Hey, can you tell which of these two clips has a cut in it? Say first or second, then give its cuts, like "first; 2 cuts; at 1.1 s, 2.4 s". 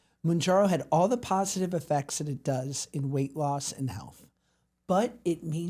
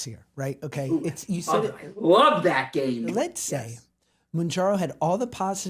second; 1 cut; at 3.1 s